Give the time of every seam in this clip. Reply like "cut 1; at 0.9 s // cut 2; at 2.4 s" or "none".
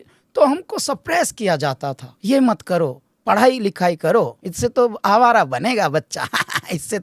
cut 1; at 2.1 s // cut 2; at 4.4 s